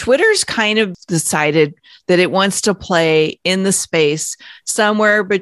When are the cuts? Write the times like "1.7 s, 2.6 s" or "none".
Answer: 0.9 s, 3.4 s